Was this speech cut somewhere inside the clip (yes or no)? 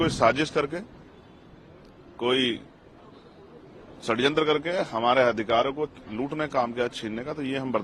no